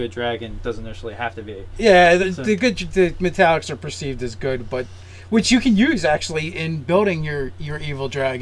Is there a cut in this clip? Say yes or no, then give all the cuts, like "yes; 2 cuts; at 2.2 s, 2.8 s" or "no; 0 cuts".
yes; 1 cut; at 4.0 s